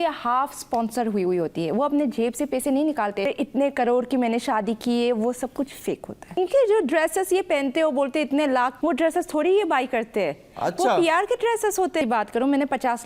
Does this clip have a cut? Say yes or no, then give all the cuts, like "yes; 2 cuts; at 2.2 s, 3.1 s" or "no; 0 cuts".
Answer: yes; 4 cuts; at 3.3 s, 6.4 s, 8.7 s, 12.0 s